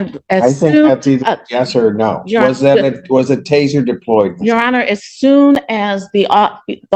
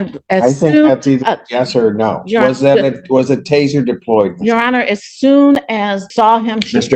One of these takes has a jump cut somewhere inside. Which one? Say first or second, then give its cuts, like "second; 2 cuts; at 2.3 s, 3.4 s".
second; 1 cut; at 6.0 s